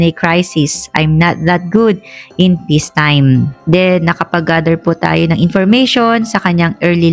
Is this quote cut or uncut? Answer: uncut